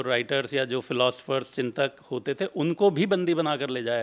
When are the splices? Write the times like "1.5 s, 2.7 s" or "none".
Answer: none